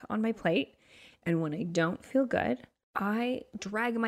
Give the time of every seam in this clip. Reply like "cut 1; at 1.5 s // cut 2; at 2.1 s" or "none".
cut 1; at 2.8 s